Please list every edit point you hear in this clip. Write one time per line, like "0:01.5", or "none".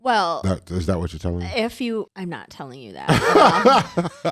0:02.1